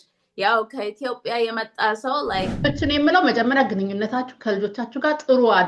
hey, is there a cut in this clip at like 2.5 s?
yes; 1 cut; at 2.5 s

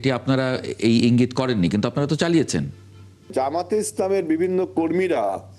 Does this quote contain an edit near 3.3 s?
yes; 1 cut; at 3.3 s

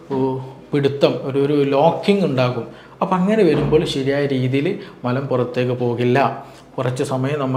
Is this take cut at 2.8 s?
no; 0 cuts

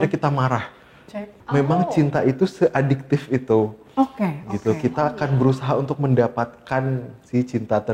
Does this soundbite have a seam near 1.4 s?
yes; 1 cut; at 1.4 s

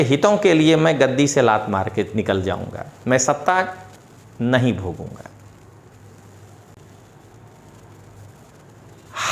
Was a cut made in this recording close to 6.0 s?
no; 0 cuts

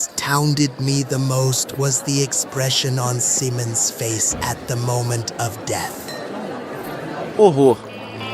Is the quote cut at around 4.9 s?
no; 1 cut; at 7.3 s

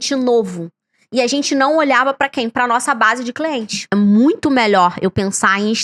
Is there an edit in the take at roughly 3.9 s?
yes; 1 cut; at 3.9 s

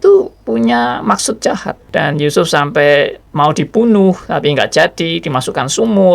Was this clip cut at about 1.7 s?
yes; 1 cut; at 1.7 s

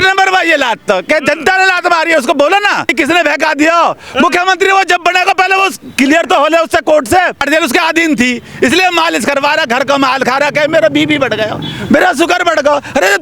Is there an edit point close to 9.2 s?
no; 2 cuts; at 2.9 s, 7.4 s

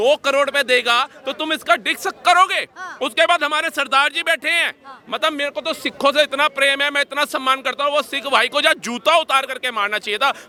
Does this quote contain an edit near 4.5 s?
no; 0 cuts

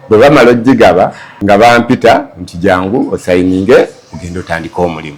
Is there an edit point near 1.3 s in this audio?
yes; 1 cut; at 1.3 s

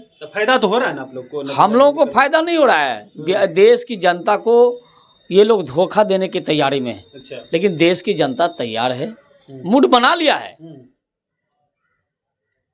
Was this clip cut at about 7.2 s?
no; 0 cuts

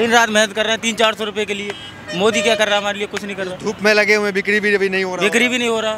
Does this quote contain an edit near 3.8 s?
no; 0 cuts

